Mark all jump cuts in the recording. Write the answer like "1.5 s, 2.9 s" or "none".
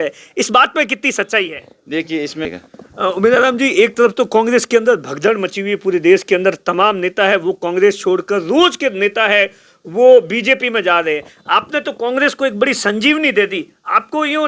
2.5 s

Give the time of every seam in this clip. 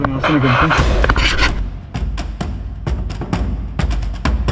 1.3 s

